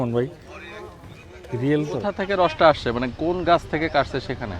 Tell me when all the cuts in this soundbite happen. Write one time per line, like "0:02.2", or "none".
0:02.2